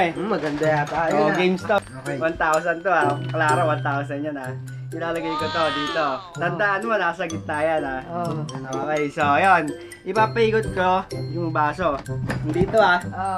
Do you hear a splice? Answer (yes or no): yes